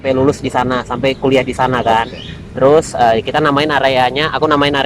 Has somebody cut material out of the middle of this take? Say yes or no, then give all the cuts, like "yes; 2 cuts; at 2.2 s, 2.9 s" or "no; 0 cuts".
no; 0 cuts